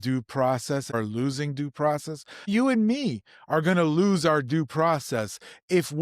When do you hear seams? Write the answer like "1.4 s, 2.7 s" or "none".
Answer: 1.0 s, 2.5 s